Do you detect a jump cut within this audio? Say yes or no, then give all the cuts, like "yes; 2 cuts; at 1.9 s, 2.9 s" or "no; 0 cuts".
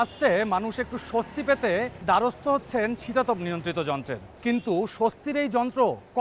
yes; 2 cuts; at 1.9 s, 4.2 s